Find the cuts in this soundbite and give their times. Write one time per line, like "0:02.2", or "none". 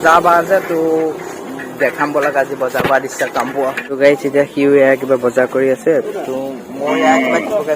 0:03.9